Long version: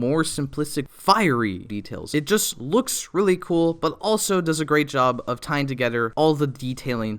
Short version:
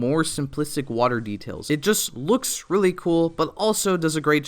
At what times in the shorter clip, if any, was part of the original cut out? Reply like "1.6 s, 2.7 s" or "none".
1.0 s